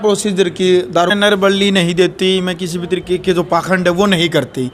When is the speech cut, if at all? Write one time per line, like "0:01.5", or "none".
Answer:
0:01.1